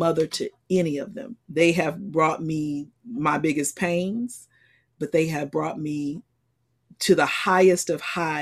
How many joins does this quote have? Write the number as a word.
one